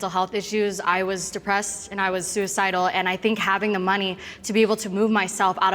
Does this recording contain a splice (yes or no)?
no